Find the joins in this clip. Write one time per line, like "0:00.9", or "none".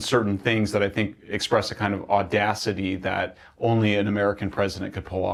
none